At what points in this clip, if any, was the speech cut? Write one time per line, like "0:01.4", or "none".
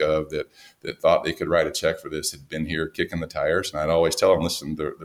0:03.7